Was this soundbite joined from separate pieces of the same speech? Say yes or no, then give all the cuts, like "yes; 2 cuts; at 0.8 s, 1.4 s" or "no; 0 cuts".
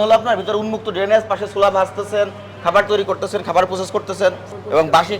no; 0 cuts